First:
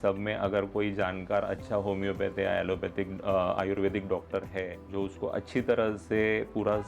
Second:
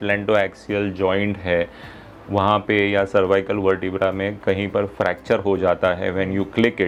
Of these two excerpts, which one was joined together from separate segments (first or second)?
first